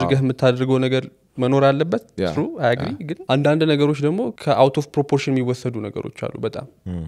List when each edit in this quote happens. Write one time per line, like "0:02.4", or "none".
0:03.1
0:04.3